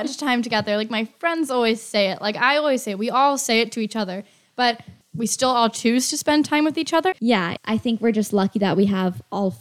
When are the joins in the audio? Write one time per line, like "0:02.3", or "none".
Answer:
0:04.9
0:07.2